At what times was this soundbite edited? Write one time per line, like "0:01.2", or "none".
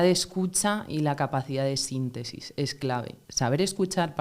0:03.2